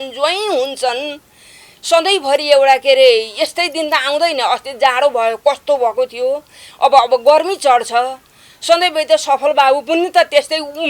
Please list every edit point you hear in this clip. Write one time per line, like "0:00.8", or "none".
none